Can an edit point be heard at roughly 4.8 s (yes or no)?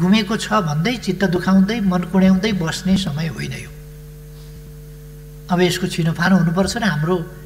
no